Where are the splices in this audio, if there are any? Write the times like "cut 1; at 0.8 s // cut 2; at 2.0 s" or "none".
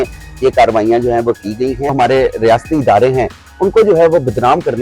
cut 1; at 1.9 s